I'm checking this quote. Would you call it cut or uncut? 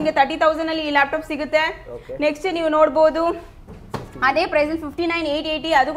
uncut